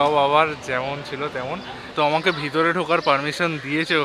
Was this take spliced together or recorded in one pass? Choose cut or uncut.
cut